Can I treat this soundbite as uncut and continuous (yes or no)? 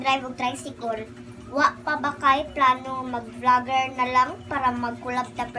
yes